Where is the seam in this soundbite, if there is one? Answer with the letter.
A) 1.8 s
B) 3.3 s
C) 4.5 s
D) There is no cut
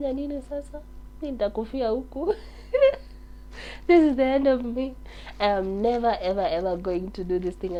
D